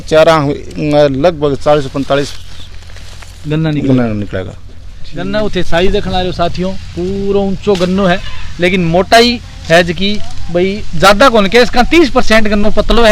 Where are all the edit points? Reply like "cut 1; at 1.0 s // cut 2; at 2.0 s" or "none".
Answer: cut 1; at 5.3 s